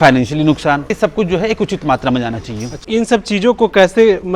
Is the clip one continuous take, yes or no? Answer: no